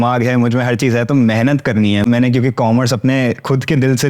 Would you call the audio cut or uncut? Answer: cut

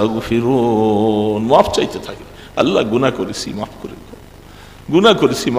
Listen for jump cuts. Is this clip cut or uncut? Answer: uncut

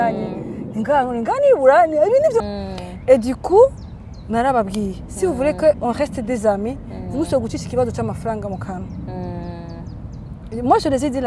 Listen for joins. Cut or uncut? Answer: cut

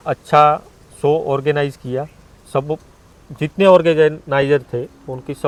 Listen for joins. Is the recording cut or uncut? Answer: uncut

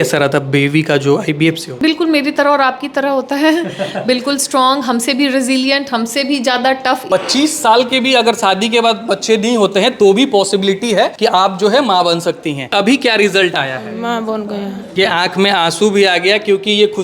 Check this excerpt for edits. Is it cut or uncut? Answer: cut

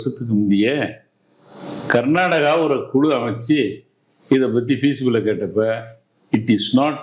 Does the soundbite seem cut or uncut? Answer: uncut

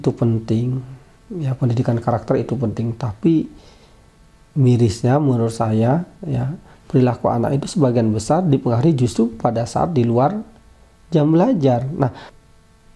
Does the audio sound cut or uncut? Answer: uncut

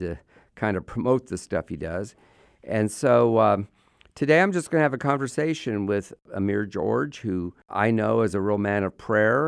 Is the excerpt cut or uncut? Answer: cut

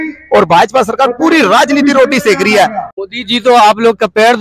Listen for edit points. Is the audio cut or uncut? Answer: cut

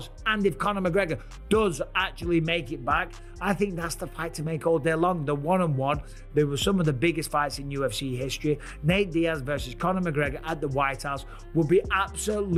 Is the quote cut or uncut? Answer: uncut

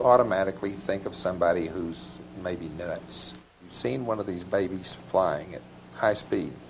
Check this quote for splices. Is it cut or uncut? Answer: cut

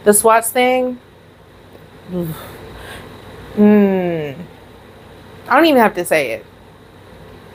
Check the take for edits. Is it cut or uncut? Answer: uncut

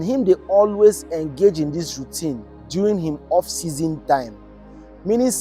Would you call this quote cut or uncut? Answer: uncut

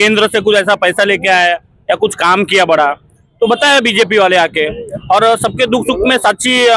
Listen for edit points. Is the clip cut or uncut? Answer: uncut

